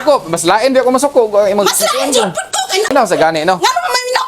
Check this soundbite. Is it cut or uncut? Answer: cut